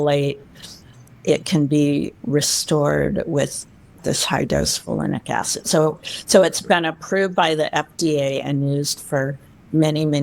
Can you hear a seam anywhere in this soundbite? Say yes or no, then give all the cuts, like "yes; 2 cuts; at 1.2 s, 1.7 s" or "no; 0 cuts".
no; 0 cuts